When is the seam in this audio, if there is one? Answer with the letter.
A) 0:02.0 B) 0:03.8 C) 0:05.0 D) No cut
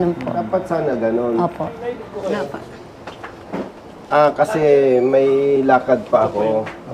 A